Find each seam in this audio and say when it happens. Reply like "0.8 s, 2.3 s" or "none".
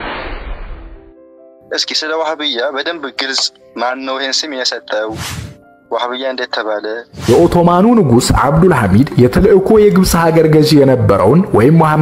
1.5 s, 7.3 s